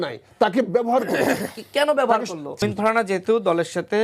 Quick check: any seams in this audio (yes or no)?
yes